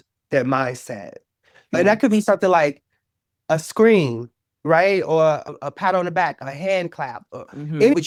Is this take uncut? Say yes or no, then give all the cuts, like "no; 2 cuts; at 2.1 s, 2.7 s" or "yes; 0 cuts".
yes; 0 cuts